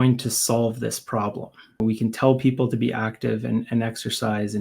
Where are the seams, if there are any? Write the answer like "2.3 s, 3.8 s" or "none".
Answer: 1.8 s

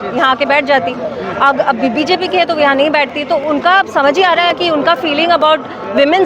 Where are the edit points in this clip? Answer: none

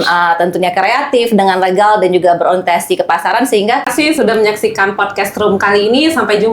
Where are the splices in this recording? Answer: 3.9 s

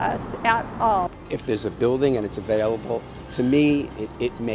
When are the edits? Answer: 1.2 s

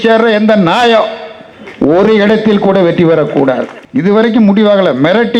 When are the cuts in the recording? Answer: 3.8 s

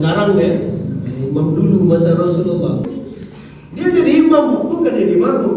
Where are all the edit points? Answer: 2.9 s

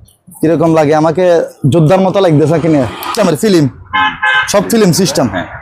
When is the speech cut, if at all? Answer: 3.1 s

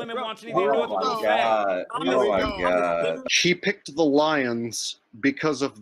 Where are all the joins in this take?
1.9 s, 3.2 s

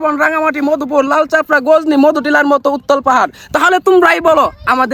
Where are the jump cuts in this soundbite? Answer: none

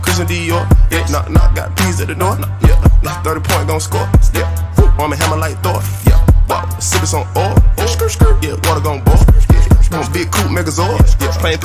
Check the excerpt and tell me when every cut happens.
none

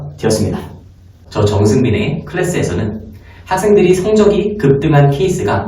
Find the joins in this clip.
1.2 s

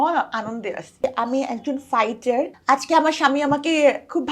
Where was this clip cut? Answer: 1.0 s, 2.6 s

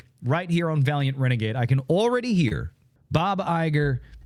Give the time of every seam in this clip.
none

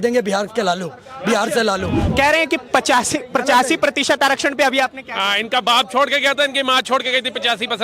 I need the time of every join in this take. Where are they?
2.0 s

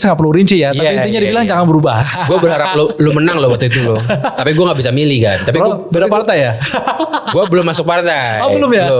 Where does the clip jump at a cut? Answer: none

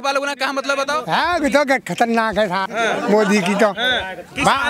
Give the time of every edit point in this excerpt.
1.0 s, 2.6 s

